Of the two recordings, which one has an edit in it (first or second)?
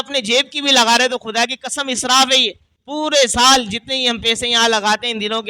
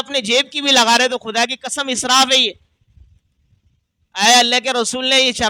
first